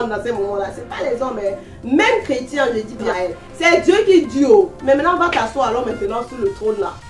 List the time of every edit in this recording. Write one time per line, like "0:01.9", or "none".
0:03.1